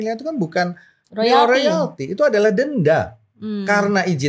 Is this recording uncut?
yes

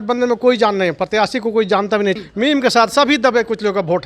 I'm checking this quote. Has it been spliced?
yes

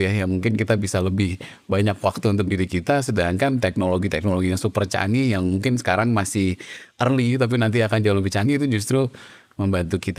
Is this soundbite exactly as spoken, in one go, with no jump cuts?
yes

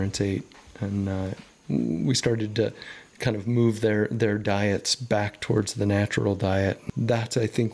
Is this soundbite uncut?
no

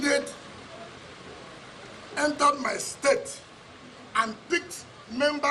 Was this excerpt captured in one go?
yes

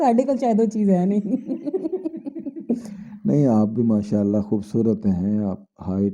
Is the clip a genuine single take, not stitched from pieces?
yes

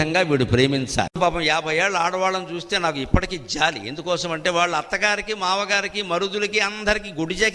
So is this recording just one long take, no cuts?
no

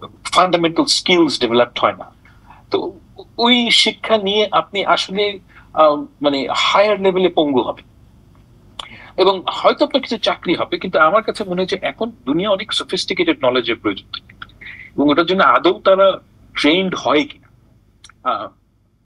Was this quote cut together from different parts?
no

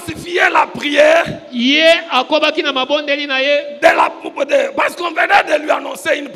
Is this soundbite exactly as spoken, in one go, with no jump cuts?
yes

